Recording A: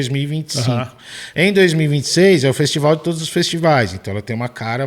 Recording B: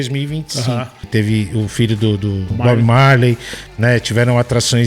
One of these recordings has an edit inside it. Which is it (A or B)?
B